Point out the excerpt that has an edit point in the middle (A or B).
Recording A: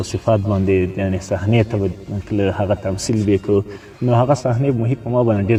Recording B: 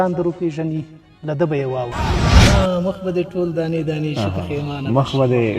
B